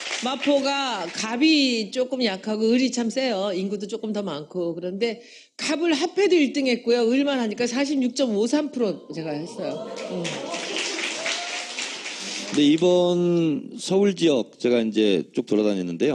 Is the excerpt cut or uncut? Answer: cut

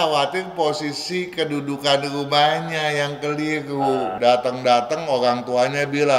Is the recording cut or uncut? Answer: cut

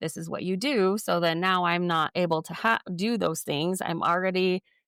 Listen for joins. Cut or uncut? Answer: uncut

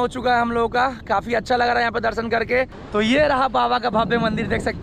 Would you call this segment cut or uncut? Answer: cut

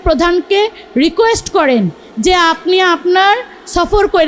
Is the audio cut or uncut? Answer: uncut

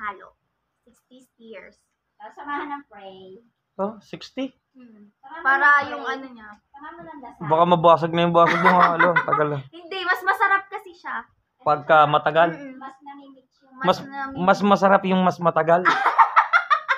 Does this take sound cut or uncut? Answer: uncut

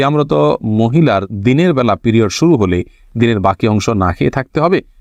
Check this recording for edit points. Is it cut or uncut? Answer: uncut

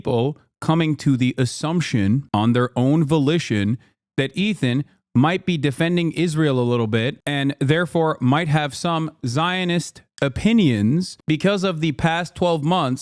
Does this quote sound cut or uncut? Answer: uncut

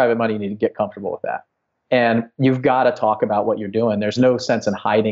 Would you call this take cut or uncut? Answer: cut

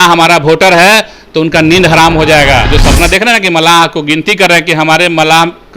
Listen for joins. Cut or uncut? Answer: cut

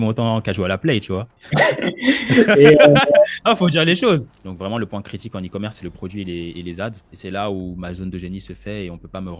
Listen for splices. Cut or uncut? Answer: cut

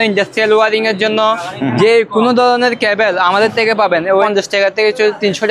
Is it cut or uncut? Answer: cut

